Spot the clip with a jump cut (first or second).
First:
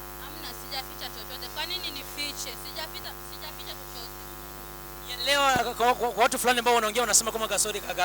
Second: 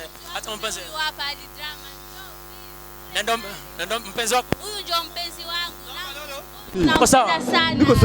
second